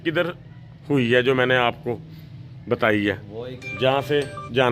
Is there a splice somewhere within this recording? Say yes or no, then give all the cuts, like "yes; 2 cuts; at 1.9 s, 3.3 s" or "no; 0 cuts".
yes; 1 cut; at 3.6 s